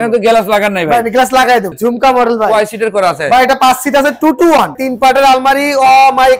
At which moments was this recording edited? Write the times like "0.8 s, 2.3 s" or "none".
1.7 s, 4.8 s